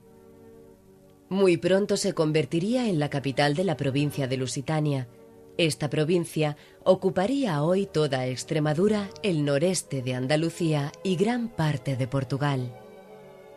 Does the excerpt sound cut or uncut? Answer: cut